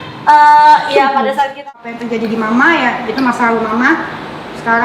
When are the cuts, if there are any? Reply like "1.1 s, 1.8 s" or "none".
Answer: 1.6 s